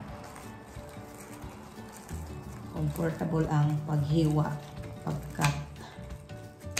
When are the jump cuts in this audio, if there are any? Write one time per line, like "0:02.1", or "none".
none